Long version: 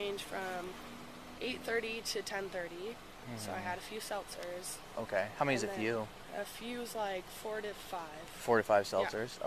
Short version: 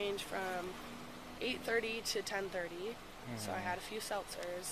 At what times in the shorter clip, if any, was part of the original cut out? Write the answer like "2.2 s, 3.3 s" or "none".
none

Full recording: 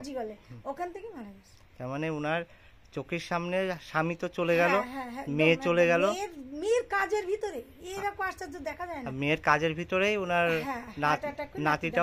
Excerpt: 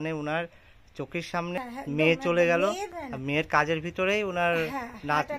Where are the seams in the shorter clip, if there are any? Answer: 1.5 s, 3.0 s

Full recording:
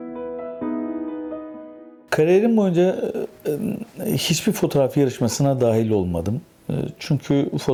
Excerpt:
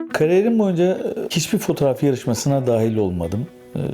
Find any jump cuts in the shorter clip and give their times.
1.3 s

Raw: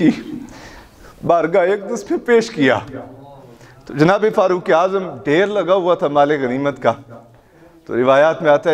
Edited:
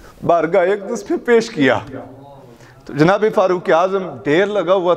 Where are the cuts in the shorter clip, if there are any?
none

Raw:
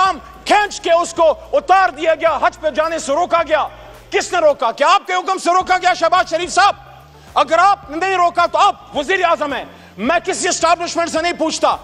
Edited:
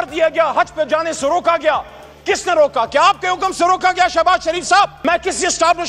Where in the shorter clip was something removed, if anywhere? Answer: 5.0 s

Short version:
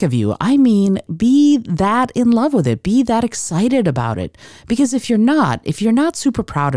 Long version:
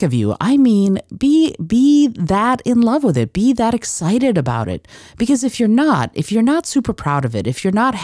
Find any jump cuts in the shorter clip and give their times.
1.1 s

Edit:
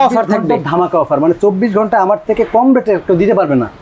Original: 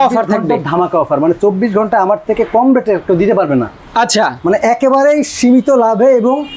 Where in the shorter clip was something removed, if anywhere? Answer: none

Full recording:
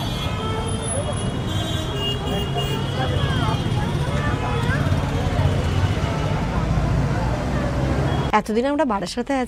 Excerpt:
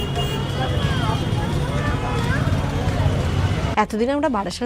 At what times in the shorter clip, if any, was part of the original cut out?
3.7 s

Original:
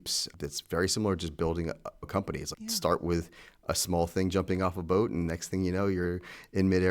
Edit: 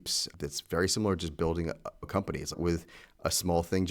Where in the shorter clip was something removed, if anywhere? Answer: 2.6 s

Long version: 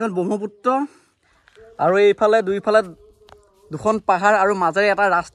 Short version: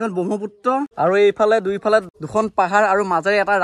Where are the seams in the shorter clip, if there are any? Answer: 0.9 s, 2.2 s

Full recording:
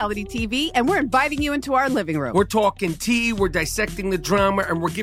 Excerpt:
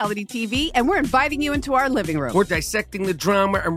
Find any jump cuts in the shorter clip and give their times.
2.5 s

